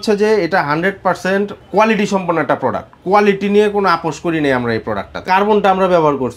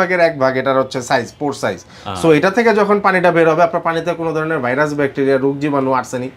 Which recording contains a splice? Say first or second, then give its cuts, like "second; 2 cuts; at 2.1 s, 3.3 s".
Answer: first; 2 cuts; at 1.6 s, 5.1 s